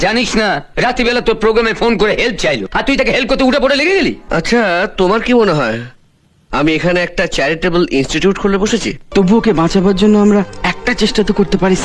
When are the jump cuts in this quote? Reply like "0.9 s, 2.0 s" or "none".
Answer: 4.2 s, 9.0 s